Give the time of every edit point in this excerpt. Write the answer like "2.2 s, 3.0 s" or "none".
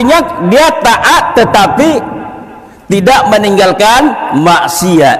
none